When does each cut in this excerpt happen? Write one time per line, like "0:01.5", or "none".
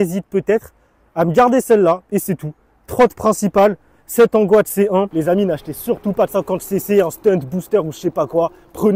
0:05.2